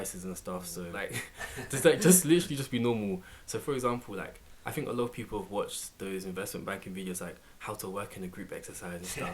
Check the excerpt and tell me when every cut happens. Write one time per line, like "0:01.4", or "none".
0:00.9